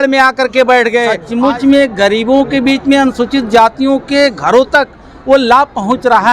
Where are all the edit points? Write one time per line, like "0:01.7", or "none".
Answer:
0:01.2